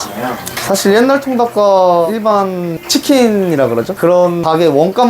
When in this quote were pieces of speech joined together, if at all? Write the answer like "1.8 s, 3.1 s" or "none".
2.1 s, 3.9 s